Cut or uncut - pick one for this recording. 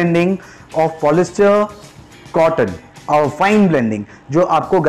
uncut